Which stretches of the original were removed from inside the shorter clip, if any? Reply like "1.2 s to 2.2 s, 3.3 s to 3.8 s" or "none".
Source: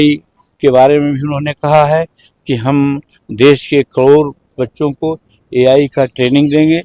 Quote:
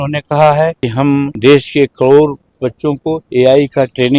2.4 s to 3.0 s, 5.1 s to 5.4 s